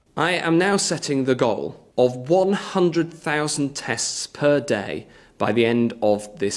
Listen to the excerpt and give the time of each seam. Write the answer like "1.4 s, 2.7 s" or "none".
1.7 s